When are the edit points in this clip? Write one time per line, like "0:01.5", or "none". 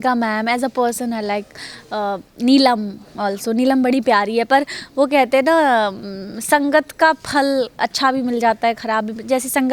none

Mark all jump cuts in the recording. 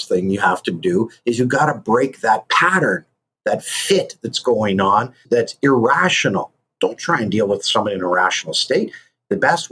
0:05.2
0:06.7

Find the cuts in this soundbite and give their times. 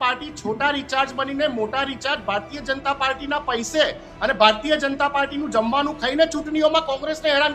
none

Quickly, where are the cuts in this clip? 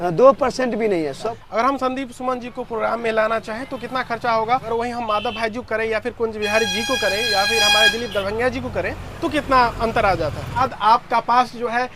0:01.2
0:04.7
0:10.6

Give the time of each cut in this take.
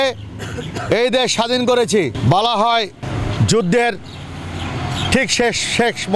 0:02.2
0:03.0

